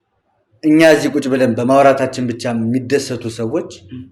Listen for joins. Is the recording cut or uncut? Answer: uncut